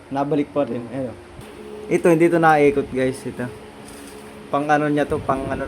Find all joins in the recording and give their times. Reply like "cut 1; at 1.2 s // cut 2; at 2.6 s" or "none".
cut 1; at 1.2 s